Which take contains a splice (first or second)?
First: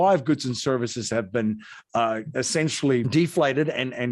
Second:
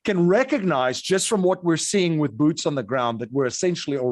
first